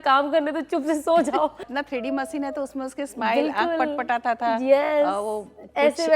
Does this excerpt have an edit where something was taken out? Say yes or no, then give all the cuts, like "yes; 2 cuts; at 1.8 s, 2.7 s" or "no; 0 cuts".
yes; 1 cut; at 1.7 s